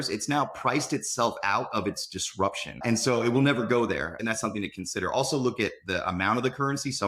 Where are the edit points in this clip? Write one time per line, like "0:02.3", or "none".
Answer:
0:02.8
0:04.1